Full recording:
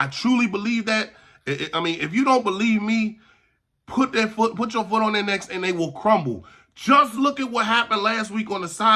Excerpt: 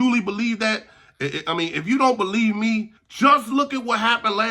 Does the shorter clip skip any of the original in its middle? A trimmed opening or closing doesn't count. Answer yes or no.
yes